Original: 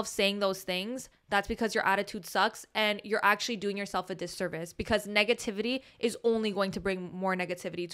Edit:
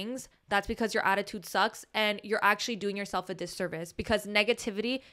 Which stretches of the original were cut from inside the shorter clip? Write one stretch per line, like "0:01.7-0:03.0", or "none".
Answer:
none